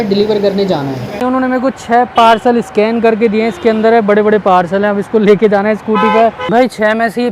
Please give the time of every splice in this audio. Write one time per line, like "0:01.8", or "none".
0:01.2
0:06.4